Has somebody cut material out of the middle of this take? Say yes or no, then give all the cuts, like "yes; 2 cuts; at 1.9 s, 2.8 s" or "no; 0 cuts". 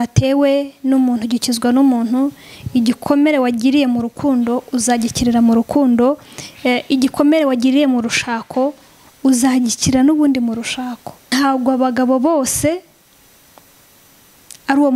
yes; 1 cut; at 11.2 s